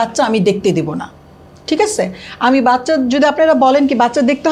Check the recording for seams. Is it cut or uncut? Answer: uncut